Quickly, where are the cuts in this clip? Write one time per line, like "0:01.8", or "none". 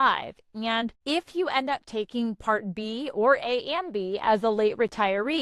0:01.0

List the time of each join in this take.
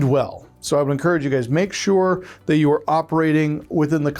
none

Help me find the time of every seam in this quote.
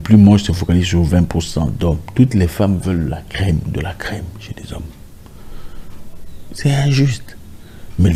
none

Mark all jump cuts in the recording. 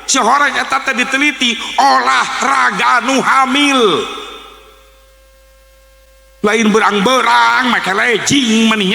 0:06.0

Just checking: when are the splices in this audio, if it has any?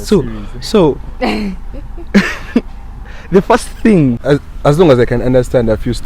0:04.2

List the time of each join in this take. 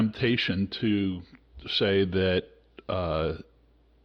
none

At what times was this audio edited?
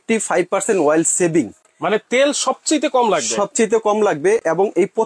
none

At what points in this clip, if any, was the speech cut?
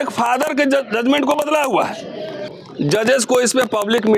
0:02.4

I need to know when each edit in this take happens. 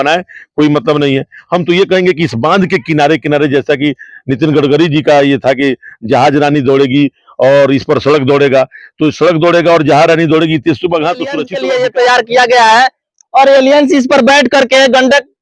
0:11.5

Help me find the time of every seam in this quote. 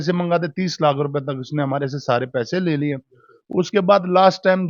none

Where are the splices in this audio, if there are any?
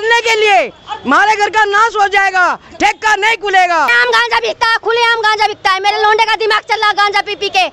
0:03.9

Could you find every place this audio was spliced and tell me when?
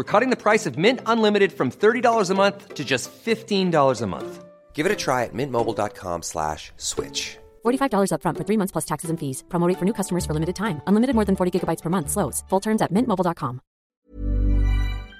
0:13.8

